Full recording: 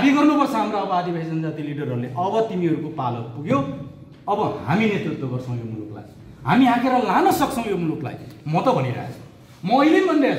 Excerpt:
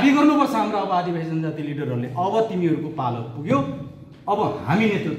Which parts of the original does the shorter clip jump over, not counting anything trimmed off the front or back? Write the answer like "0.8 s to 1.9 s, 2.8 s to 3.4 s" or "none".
none